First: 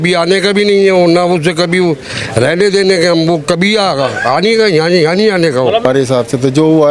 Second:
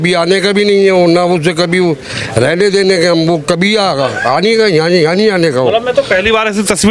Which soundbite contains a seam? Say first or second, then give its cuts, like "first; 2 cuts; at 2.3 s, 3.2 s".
first; 1 cut; at 5.9 s